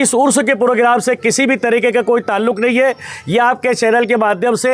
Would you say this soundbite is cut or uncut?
uncut